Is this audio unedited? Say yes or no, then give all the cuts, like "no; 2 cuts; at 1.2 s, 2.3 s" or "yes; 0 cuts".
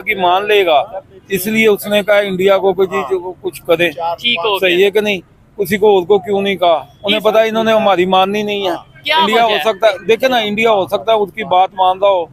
yes; 0 cuts